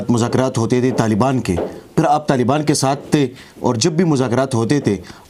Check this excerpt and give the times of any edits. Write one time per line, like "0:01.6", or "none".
none